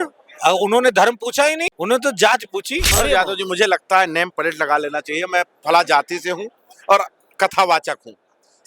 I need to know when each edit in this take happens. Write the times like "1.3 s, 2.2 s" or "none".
1.7 s, 2.8 s